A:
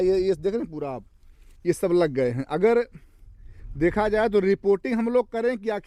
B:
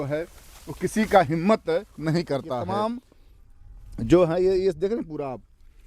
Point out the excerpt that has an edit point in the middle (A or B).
B